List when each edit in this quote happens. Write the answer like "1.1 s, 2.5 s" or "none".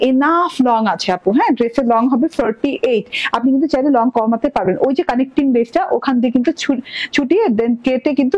none